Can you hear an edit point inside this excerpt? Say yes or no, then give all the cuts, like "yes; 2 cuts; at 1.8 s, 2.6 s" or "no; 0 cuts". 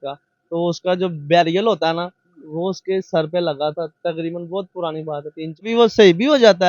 yes; 1 cut; at 5.6 s